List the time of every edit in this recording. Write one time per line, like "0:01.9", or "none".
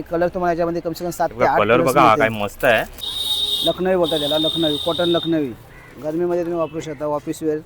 0:03.0